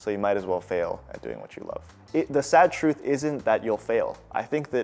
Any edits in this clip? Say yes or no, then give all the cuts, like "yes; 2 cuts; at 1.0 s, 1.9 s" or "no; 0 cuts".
yes; 1 cut; at 1.9 s